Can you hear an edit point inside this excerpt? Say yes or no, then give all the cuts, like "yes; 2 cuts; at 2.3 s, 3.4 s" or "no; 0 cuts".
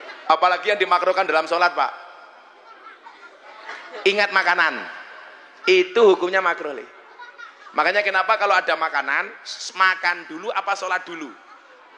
no; 0 cuts